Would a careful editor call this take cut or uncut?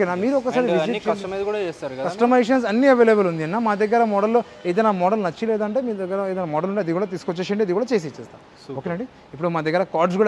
uncut